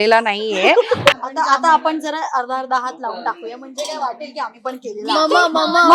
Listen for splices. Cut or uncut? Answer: cut